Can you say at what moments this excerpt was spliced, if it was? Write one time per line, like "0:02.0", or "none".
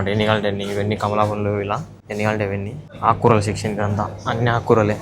0:02.0
0:02.8